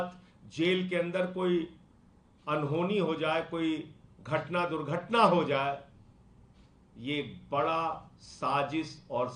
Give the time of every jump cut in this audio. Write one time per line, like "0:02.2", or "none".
none